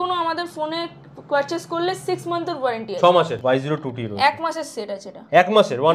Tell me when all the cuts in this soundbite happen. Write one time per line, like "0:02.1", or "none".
0:03.3